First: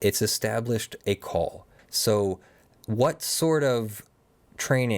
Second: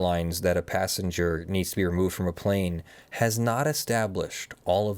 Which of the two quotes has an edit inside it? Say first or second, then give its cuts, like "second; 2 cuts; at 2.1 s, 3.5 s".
first; 1 cut; at 1.7 s